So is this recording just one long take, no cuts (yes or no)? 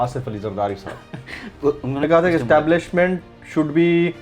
no